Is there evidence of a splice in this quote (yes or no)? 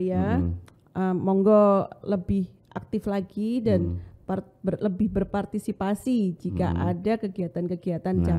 no